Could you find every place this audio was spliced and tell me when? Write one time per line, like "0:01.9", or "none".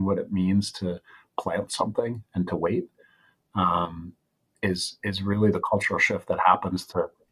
none